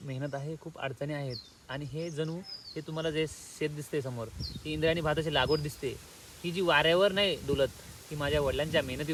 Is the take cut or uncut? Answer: uncut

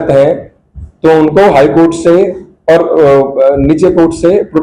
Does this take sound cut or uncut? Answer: uncut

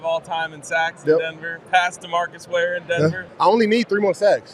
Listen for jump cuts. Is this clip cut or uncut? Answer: cut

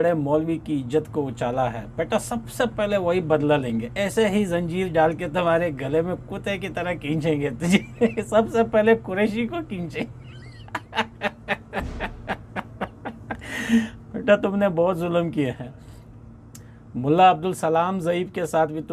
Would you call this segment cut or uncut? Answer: uncut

